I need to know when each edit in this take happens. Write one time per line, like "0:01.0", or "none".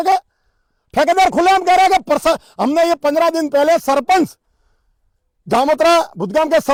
none